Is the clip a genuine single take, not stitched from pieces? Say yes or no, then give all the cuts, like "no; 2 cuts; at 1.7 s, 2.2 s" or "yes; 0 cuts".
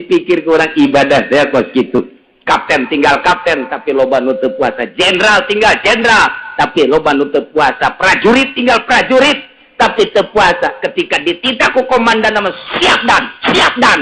yes; 0 cuts